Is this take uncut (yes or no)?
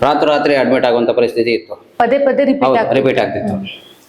yes